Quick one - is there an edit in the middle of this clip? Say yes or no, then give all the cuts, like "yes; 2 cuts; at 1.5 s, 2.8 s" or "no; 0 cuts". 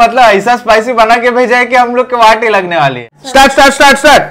yes; 1 cut; at 3.2 s